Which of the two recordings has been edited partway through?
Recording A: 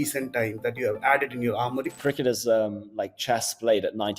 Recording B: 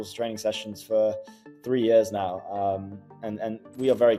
A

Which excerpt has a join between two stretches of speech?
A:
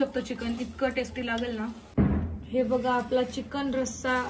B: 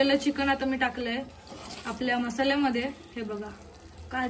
A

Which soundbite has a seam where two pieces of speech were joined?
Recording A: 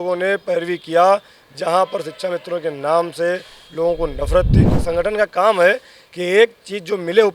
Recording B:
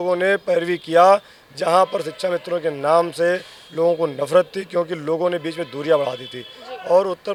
A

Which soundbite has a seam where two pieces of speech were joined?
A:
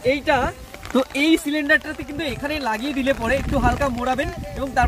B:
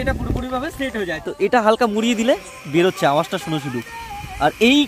B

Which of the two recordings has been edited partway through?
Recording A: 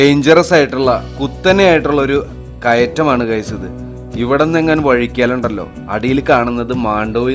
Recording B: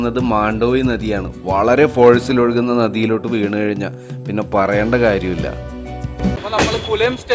B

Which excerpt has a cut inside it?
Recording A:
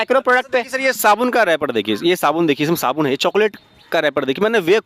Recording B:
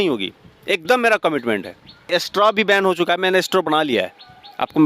B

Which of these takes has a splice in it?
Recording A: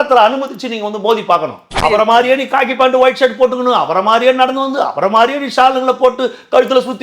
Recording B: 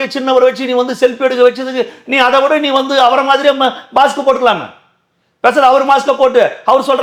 A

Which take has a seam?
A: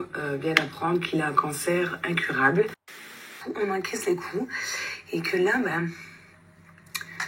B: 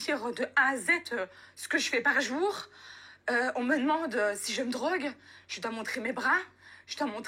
A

